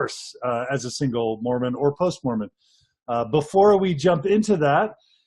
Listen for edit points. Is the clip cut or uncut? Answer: cut